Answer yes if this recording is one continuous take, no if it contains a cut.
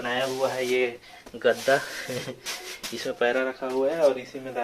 yes